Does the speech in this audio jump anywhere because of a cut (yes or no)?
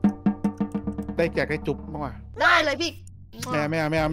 yes